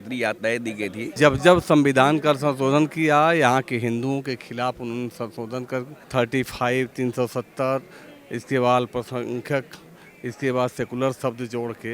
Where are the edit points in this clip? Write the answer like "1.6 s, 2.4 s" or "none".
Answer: 1.1 s, 6.0 s